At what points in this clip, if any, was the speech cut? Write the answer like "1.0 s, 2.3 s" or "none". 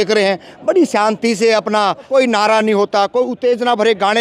2.1 s